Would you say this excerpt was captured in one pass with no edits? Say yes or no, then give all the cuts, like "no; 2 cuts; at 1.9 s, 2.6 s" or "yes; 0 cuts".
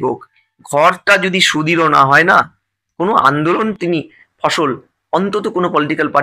yes; 0 cuts